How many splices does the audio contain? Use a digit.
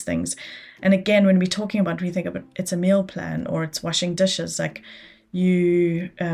0